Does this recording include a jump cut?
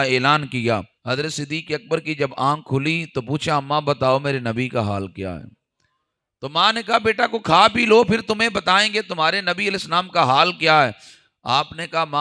yes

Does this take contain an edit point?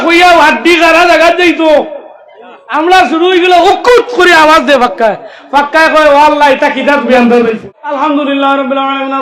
yes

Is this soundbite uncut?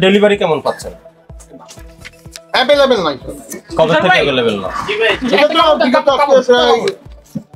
yes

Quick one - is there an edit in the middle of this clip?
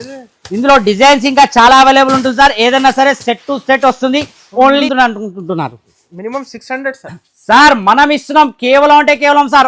yes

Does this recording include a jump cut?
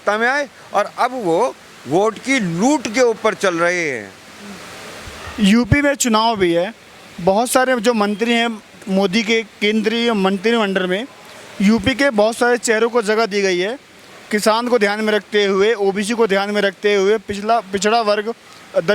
no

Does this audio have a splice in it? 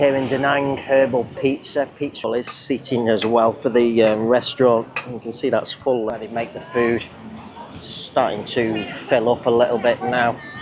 yes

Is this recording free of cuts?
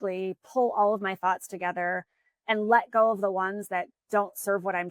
yes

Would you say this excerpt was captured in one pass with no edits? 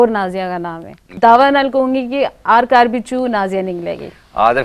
no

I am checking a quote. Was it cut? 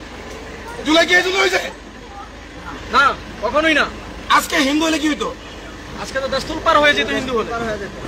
no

